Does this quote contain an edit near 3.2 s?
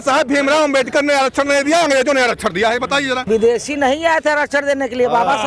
yes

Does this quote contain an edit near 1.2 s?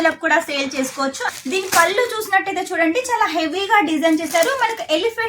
yes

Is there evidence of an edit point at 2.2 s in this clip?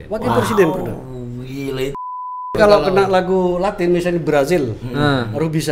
yes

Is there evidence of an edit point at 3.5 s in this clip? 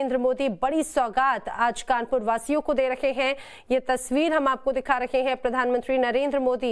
yes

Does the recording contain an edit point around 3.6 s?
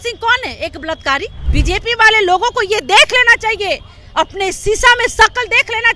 no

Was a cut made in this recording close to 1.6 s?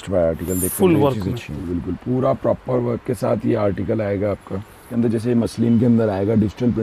yes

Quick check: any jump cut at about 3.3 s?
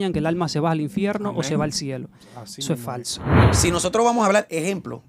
yes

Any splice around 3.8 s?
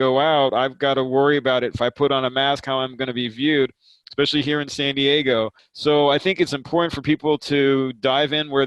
no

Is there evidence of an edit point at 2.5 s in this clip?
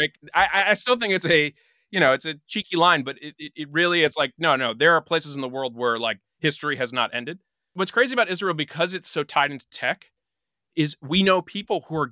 no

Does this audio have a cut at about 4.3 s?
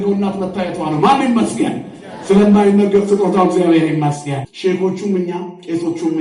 yes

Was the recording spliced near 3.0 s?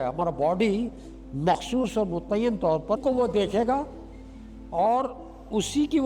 yes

